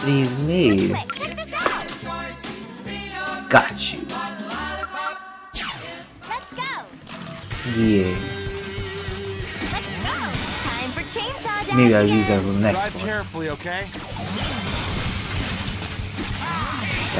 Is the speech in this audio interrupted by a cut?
yes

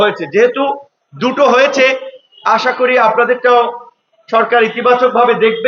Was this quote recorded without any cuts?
yes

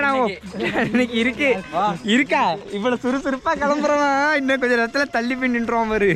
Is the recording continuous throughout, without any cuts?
yes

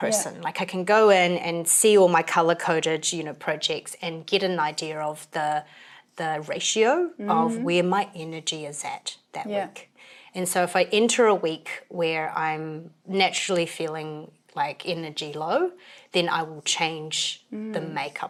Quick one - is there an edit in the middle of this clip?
no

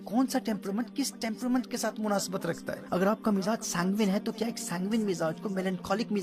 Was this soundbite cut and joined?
yes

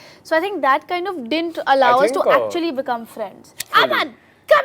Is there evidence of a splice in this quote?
yes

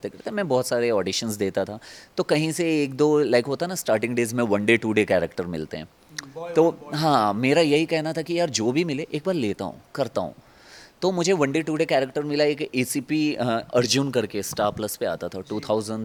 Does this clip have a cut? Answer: no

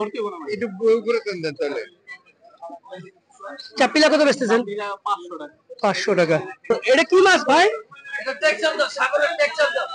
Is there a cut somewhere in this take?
yes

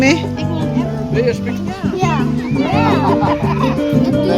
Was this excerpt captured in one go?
yes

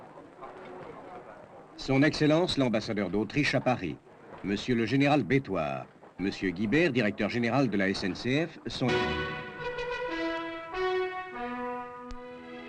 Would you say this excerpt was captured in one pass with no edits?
yes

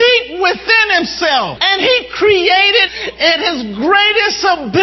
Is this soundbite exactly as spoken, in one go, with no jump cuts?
no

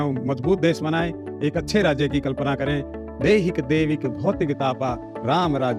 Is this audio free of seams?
yes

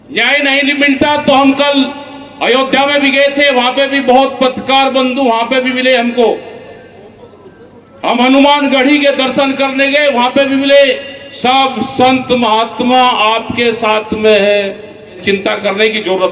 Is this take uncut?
no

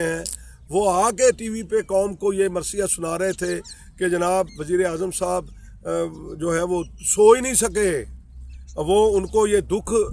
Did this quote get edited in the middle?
no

